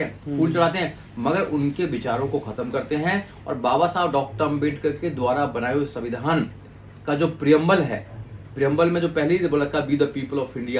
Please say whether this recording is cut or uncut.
uncut